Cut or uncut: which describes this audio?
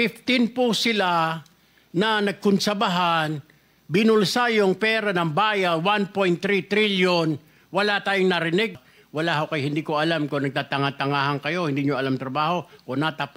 cut